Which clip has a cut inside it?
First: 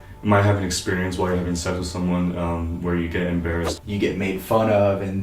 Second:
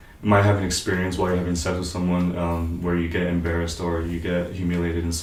first; 1 cut; at 3.7 s

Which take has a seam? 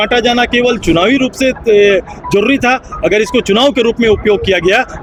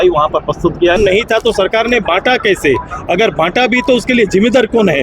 second; 1 cut; at 1.0 s

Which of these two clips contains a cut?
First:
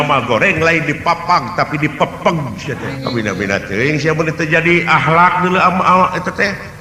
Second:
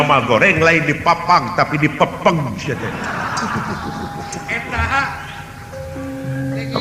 first; 1 cut; at 2.9 s

